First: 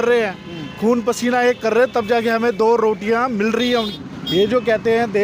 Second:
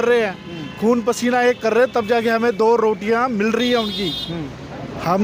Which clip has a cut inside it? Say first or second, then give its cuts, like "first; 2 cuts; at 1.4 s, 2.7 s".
first; 1 cut; at 4.0 s